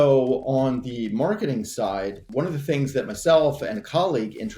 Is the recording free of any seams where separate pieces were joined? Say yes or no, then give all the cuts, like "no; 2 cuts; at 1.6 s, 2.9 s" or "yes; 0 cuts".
no; 1 cut; at 2.3 s